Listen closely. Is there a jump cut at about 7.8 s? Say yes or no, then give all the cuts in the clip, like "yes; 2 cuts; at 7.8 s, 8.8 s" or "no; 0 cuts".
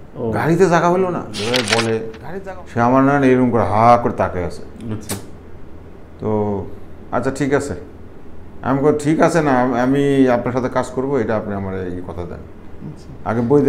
no; 1 cut; at 1.3 s